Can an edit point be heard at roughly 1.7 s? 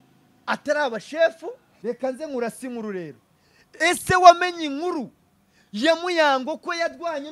yes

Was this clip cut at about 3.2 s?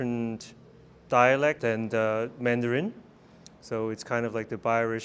no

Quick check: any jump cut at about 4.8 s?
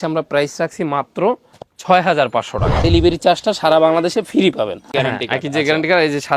yes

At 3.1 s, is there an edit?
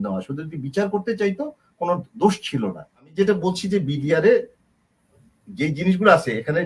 yes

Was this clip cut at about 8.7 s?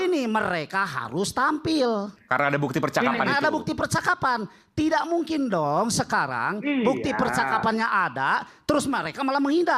no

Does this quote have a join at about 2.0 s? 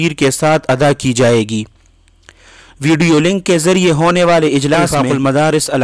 no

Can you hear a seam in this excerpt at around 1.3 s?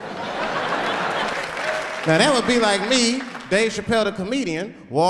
yes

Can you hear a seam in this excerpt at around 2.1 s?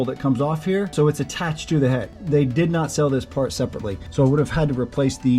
yes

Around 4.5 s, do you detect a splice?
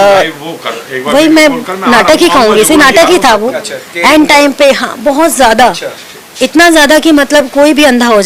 no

